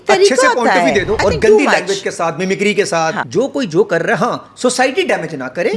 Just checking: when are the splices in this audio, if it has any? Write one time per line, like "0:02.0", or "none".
0:01.2
0:03.2